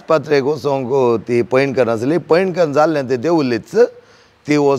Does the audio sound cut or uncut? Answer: uncut